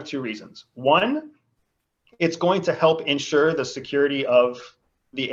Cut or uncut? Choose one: uncut